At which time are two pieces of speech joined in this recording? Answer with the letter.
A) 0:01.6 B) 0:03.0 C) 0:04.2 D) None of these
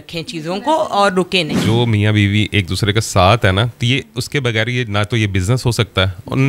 A